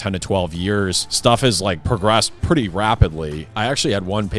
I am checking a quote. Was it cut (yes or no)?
yes